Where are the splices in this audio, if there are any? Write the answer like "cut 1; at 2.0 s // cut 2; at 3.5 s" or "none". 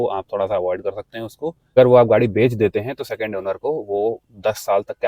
cut 1; at 1.7 s